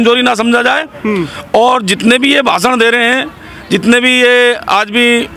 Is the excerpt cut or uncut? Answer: uncut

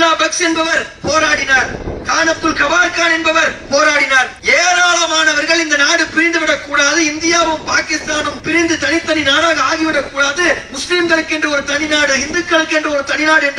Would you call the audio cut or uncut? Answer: cut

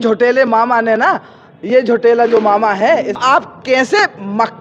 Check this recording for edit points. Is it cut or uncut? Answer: cut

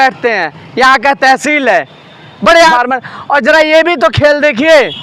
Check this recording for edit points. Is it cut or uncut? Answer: cut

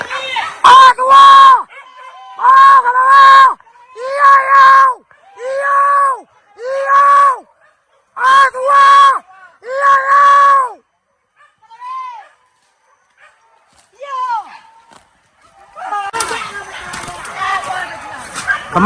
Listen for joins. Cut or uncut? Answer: cut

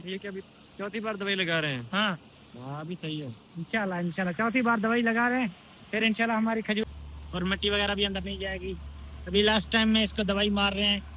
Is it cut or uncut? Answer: cut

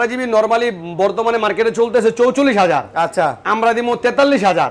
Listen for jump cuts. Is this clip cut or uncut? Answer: uncut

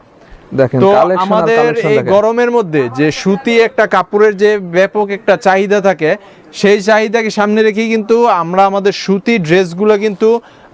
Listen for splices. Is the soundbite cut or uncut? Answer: uncut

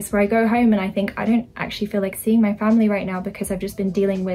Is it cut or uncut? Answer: uncut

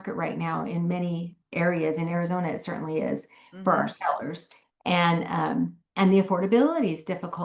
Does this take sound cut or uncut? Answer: uncut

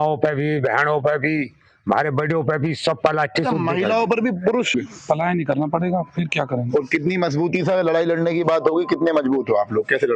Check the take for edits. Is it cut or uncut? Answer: cut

